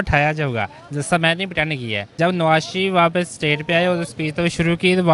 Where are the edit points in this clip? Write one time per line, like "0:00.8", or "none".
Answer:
0:02.1